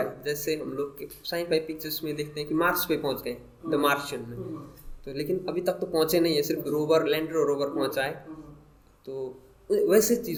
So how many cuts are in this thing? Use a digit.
0